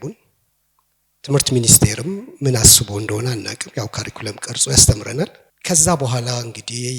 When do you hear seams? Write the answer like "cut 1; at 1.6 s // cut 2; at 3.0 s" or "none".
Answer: cut 1; at 5.5 s